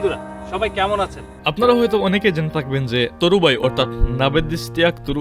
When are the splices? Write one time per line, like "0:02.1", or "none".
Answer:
none